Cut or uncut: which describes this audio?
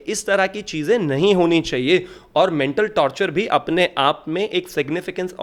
uncut